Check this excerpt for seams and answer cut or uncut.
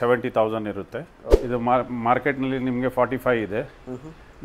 cut